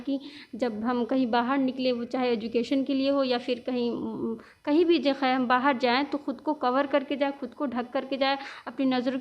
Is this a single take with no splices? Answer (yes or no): yes